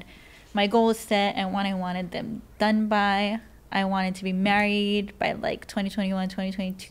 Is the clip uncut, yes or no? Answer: yes